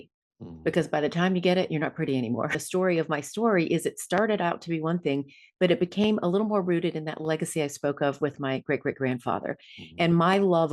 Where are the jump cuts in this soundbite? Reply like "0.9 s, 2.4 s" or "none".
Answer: 2.6 s